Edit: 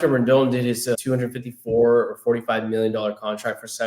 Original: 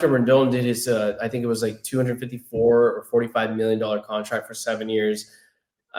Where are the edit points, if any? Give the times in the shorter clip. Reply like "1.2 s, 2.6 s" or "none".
1.0 s